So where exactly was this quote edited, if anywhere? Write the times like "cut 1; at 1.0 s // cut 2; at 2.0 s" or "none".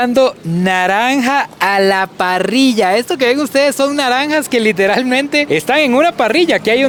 none